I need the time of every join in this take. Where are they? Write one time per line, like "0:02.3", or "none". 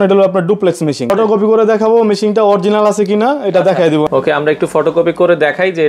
0:01.1
0:04.1